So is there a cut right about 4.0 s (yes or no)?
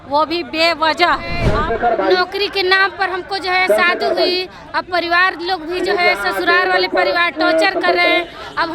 no